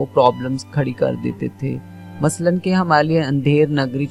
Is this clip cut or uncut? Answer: uncut